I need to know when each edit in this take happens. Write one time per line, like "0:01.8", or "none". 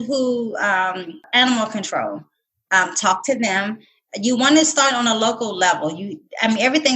0:01.2